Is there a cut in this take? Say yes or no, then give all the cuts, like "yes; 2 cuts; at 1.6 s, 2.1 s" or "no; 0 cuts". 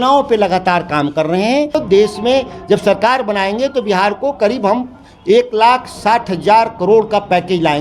yes; 1 cut; at 1.8 s